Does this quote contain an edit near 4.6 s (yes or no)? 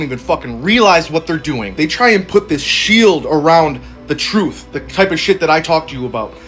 no